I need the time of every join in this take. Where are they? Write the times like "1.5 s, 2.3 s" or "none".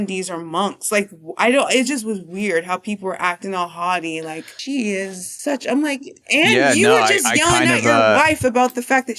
none